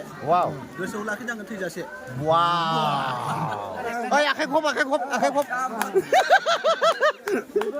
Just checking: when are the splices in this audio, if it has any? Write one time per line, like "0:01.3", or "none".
0:03.9